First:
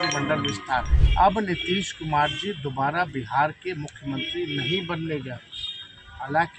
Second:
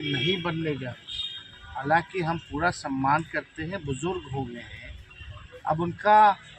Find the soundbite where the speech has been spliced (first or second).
first